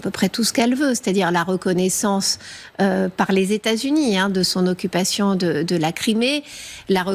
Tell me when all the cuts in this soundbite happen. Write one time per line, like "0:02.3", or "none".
none